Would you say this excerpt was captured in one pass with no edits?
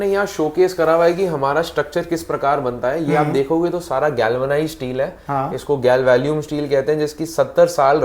yes; 0 cuts

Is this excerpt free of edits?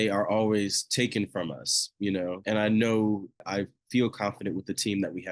no; 2 cuts; at 2.4 s, 3.4 s

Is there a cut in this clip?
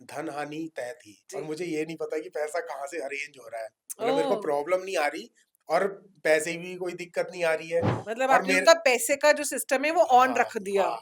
yes; 1 cut; at 1.2 s

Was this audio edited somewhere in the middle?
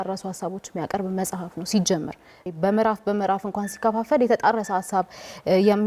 yes; 1 cut; at 2.4 s

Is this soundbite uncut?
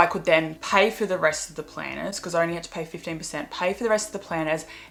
yes; 0 cuts

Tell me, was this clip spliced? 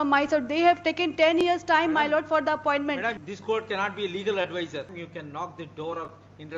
yes; 2 cuts; at 3.2 s, 4.9 s

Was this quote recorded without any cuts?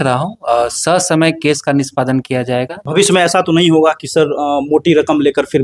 no; 1 cut; at 2.8 s

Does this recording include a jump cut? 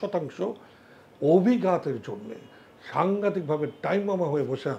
no; 0 cuts

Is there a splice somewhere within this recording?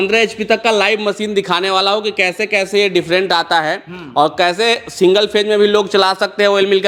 no; 0 cuts

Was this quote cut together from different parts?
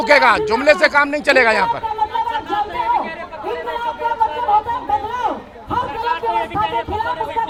no; 0 cuts

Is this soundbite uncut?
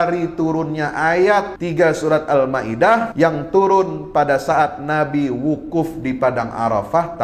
no; 2 cuts; at 1.6 s, 3.1 s

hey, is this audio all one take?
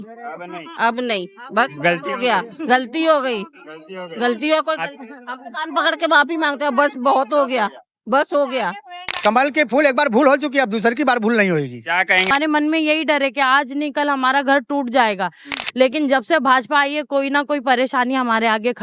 no; 3 cuts; at 9.2 s, 12.3 s, 15.5 s

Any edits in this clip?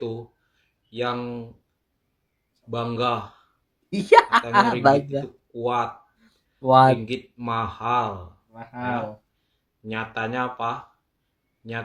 no; 0 cuts

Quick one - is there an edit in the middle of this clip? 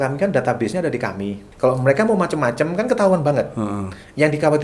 yes; 1 cut; at 1.4 s

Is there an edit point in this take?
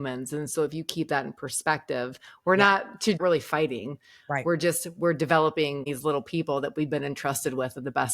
yes; 2 cuts; at 3.2 s, 5.8 s

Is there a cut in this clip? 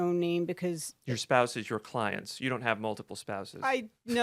no; 0 cuts

